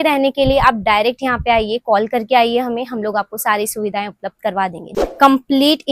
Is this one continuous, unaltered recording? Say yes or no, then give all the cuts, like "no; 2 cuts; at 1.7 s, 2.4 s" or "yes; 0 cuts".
no; 1 cut; at 4.9 s